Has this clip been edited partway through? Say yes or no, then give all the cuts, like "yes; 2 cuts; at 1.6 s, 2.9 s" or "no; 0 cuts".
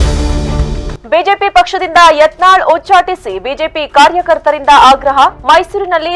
yes; 1 cut; at 0.9 s